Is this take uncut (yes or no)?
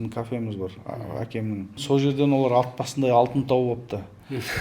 no